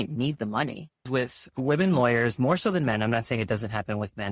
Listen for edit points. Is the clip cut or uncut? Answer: cut